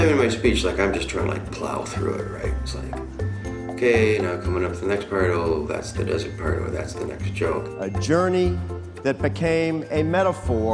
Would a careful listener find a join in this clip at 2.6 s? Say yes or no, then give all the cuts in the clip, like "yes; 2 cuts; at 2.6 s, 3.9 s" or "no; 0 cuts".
yes; 1 cut; at 2.6 s